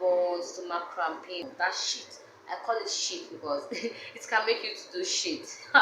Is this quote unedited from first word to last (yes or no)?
no